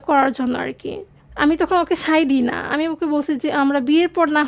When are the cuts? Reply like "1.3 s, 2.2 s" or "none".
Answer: none